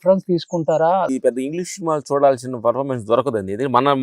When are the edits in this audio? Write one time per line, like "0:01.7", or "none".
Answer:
0:01.1